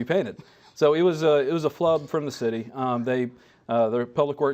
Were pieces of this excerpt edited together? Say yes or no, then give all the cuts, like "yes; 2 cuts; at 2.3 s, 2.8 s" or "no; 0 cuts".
yes; 1 cut; at 2.9 s